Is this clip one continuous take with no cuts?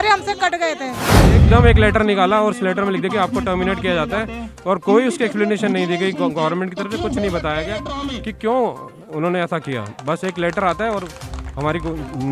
no; 1 cut; at 1.2 s

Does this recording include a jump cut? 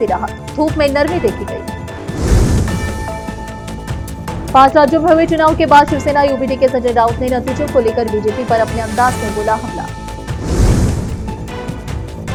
no; 0 cuts

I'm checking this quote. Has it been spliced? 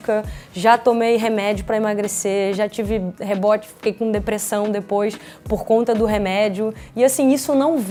no; 0 cuts

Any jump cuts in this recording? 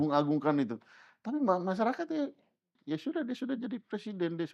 yes; 1 cut; at 2.8 s

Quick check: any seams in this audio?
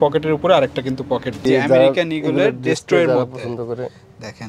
yes; 1 cut; at 1.3 s

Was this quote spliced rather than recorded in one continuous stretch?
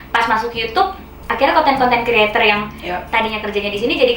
no; 0 cuts

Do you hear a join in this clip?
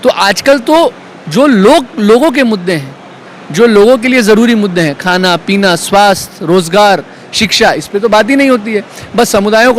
no; 0 cuts

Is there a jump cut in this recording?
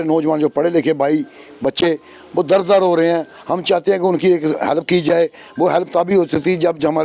no; 0 cuts

